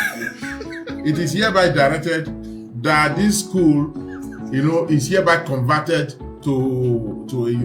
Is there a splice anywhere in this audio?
no; 0 cuts

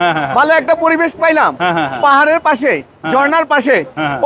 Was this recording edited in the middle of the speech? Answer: no; 0 cuts

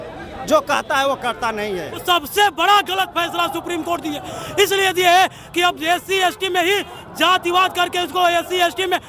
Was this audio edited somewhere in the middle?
yes; 1 cut; at 1.9 s

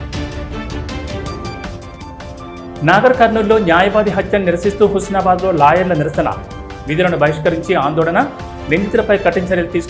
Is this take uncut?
no; 1 cut; at 1.6 s

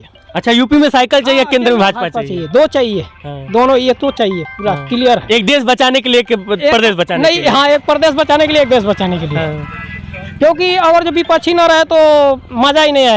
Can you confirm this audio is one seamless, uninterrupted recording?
yes; 0 cuts

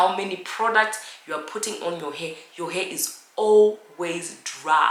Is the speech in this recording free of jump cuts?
yes; 0 cuts

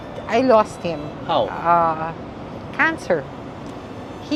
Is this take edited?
no; 0 cuts

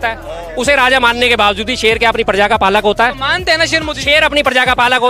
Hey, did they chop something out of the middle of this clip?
no; 0 cuts

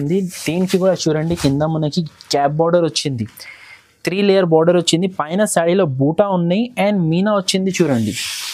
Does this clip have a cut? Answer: no; 0 cuts

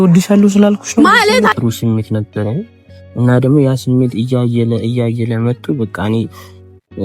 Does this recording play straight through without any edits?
no; 1 cut; at 1.5 s

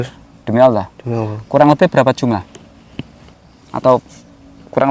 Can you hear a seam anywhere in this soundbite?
no; 0 cuts

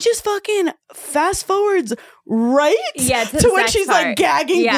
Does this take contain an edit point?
no; 0 cuts

